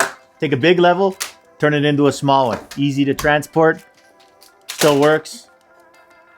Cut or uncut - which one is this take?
uncut